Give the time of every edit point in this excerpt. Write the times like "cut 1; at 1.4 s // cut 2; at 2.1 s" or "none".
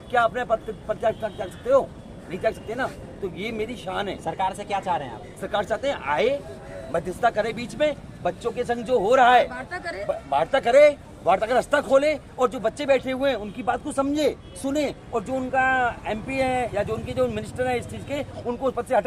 none